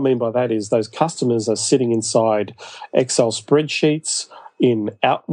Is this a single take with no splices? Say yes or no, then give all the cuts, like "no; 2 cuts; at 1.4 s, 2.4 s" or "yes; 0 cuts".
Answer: yes; 0 cuts